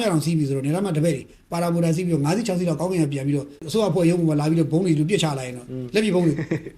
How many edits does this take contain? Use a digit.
1